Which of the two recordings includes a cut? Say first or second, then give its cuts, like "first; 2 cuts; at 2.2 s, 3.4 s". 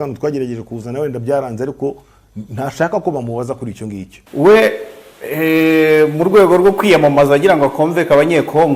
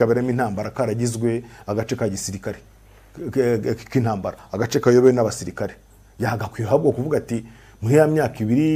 first; 1 cut; at 4.1 s